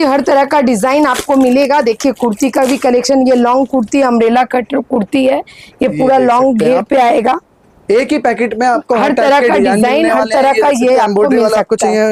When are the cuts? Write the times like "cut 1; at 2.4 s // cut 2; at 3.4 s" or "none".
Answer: none